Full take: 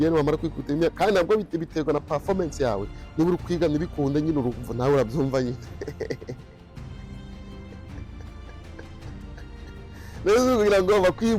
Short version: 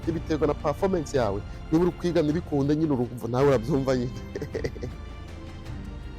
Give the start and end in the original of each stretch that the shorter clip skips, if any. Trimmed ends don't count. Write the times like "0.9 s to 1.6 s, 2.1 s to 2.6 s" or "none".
6.4 s to 8.3 s